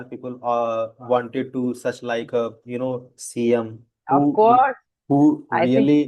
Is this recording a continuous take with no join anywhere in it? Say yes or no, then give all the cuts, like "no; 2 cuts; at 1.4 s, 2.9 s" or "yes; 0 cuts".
yes; 0 cuts